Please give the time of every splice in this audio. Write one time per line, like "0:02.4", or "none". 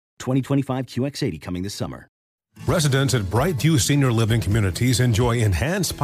0:02.2